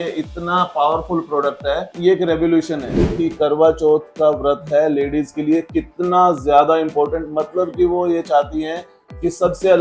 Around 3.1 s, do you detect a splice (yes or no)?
yes